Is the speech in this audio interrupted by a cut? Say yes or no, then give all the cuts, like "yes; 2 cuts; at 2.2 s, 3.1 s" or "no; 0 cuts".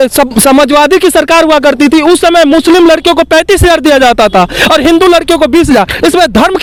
no; 0 cuts